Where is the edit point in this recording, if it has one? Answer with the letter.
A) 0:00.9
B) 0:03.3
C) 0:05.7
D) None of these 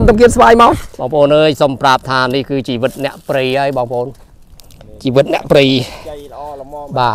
A